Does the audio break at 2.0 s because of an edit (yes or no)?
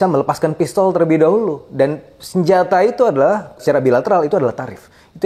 no